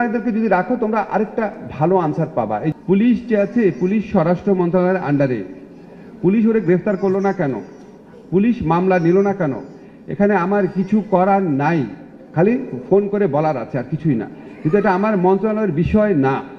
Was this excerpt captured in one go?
no; 1 cut; at 2.7 s

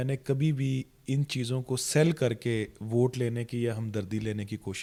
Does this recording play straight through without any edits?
yes; 0 cuts

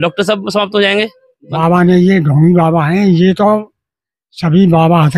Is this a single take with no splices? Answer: no; 1 cut; at 1.5 s

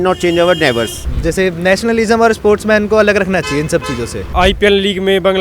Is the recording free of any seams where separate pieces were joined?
no; 2 cuts; at 1.0 s, 4.2 s

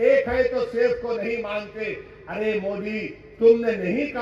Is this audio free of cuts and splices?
yes; 0 cuts

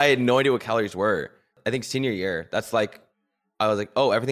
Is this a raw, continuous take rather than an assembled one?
no; 1 cut; at 1.6 s

